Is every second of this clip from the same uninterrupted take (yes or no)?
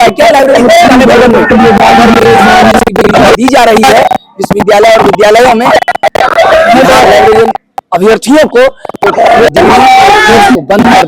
yes